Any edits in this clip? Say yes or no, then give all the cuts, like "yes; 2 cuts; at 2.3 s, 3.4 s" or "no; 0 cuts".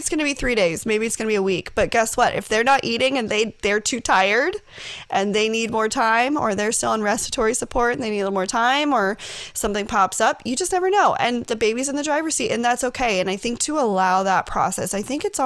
no; 0 cuts